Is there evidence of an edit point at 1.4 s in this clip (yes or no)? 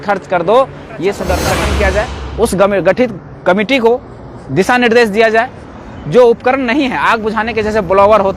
yes